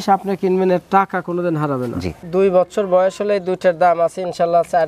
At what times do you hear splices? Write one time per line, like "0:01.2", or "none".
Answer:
0:02.2